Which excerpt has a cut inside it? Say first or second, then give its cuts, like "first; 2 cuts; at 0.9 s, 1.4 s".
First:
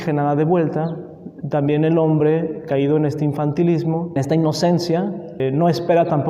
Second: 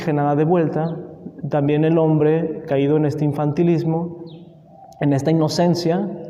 first; 2 cuts; at 4.2 s, 5.4 s